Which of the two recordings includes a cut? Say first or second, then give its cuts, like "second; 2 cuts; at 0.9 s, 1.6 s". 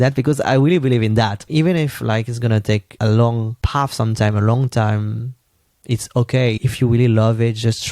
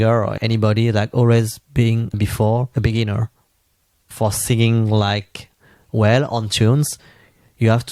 first; 2 cuts; at 1.4 s, 6.6 s